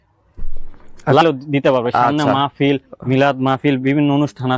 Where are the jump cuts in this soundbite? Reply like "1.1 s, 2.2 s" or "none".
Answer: 1.2 s